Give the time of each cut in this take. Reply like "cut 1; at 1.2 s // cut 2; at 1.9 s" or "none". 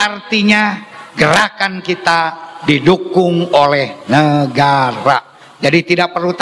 none